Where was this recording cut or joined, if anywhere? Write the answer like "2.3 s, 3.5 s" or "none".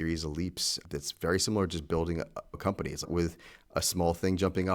3.1 s